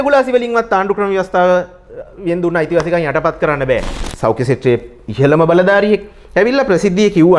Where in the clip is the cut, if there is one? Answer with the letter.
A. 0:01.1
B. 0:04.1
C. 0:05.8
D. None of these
B